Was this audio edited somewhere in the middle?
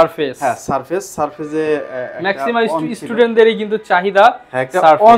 no; 0 cuts

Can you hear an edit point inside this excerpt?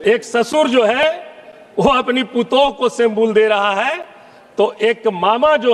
no; 0 cuts

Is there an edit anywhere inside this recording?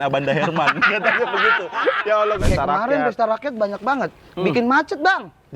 yes; 1 cut; at 2.4 s

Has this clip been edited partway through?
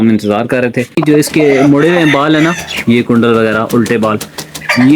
yes; 1 cut; at 0.9 s

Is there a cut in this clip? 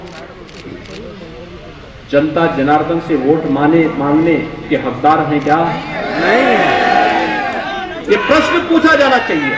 no; 0 cuts

